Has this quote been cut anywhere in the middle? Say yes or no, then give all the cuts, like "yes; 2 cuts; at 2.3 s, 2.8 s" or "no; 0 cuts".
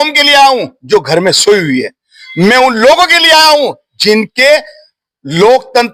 no; 0 cuts